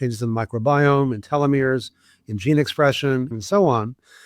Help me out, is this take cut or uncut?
cut